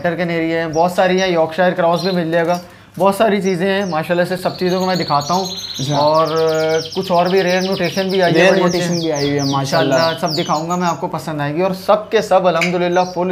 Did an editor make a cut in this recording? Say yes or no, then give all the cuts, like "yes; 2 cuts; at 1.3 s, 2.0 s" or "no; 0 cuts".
no; 0 cuts